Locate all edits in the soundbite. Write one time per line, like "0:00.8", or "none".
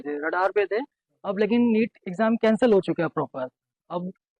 none